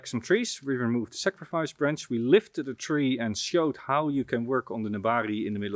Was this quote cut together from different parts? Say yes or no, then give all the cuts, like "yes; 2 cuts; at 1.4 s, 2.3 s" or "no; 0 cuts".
no; 0 cuts